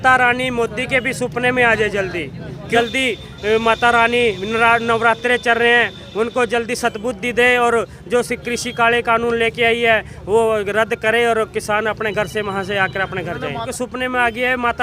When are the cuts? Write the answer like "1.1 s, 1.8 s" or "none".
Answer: 2.5 s, 13.7 s